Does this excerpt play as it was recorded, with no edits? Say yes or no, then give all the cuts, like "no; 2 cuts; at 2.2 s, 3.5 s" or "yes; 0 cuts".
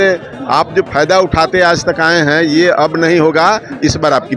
yes; 0 cuts